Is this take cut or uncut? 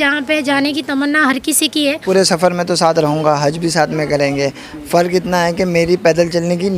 cut